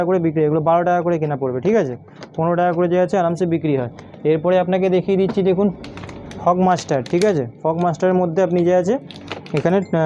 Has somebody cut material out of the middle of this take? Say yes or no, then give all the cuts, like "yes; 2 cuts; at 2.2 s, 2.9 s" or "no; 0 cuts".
no; 0 cuts